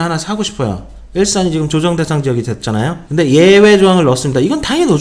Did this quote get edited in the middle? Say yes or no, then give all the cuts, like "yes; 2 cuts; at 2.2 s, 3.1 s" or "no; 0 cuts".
yes; 1 cut; at 3.0 s